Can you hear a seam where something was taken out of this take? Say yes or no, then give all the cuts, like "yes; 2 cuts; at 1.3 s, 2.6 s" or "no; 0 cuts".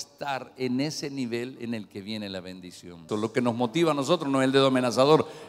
yes; 1 cut; at 3.0 s